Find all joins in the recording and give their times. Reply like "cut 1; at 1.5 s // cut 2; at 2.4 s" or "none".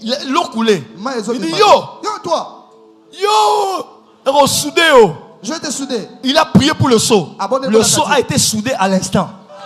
none